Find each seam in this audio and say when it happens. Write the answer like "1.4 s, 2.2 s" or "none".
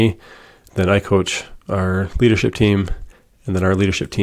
none